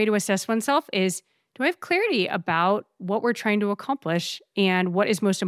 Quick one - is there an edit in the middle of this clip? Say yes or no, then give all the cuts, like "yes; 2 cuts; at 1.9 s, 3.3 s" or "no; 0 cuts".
no; 0 cuts